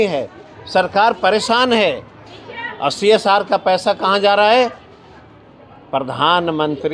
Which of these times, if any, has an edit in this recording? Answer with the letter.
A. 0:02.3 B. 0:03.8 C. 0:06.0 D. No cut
D